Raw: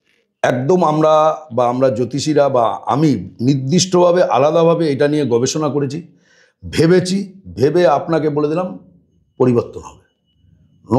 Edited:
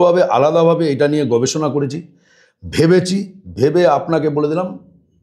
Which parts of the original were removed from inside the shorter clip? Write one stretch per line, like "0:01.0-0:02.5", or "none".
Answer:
none